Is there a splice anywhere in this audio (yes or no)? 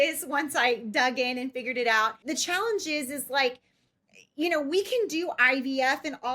yes